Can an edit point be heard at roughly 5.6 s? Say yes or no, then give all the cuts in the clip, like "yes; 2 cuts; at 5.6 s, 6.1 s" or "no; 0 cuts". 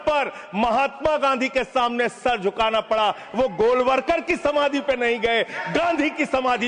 no; 0 cuts